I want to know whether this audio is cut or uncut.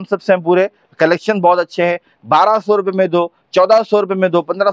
uncut